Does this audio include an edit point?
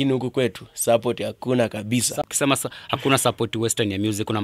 no; 0 cuts

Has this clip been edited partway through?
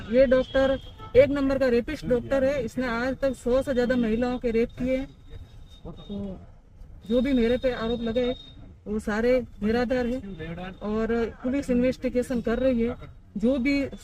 no; 0 cuts

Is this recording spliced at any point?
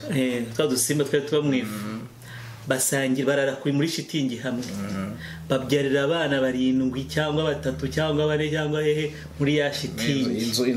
no; 0 cuts

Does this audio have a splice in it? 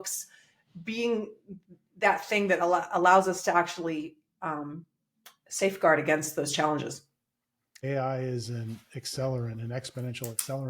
yes; 1 cut; at 7.7 s

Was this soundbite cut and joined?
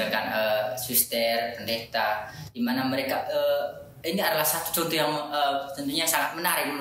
no; 0 cuts

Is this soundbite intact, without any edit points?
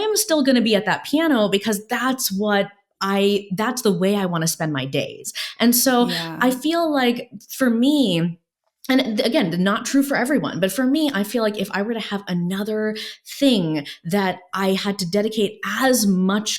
yes; 0 cuts

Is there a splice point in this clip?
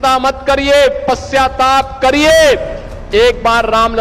no; 0 cuts

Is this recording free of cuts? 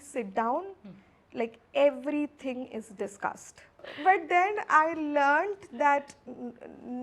no; 1 cut; at 3.9 s

